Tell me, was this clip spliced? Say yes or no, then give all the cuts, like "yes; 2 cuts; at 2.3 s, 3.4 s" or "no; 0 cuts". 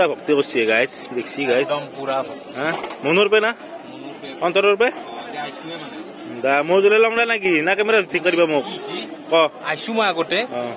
no; 0 cuts